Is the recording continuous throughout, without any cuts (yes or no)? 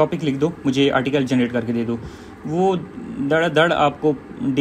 yes